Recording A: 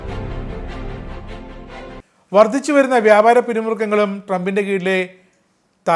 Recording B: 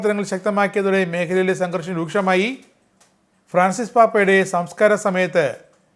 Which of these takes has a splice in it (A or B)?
A